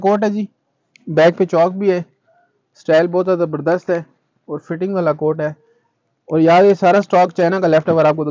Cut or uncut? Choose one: uncut